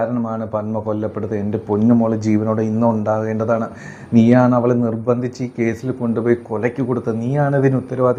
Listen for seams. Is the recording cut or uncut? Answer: uncut